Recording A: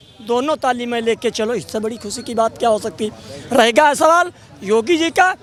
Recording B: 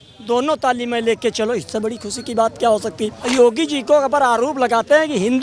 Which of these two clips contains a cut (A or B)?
B